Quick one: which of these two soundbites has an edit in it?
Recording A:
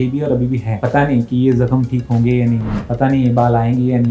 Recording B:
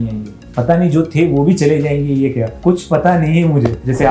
B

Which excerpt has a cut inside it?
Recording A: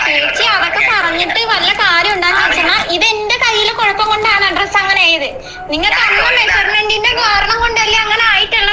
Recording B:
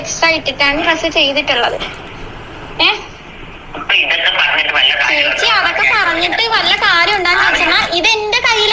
A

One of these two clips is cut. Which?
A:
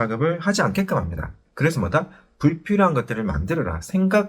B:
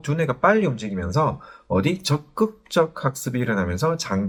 A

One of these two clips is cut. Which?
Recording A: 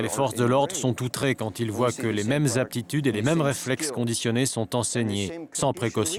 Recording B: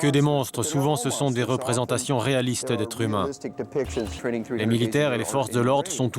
B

